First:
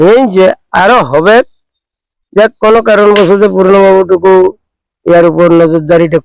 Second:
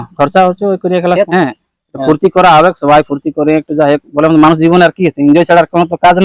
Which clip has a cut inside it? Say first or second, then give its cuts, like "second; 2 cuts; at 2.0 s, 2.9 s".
second; 1 cut; at 1.3 s